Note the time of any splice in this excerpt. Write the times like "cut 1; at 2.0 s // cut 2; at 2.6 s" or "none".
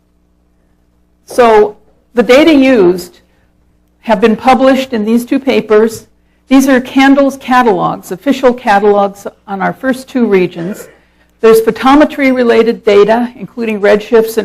cut 1; at 6.8 s